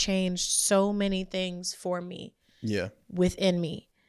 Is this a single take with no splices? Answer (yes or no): yes